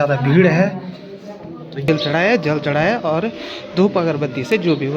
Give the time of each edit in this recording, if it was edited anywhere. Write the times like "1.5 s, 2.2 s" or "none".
1.9 s